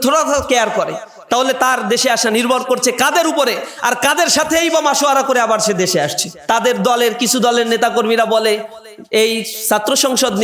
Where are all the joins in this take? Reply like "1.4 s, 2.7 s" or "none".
6.3 s